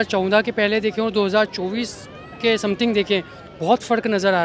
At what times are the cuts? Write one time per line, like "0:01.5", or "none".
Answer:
none